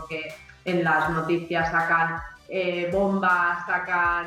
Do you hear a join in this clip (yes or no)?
no